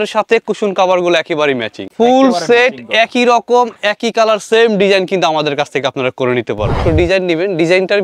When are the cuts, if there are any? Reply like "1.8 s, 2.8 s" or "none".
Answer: 1.9 s, 6.8 s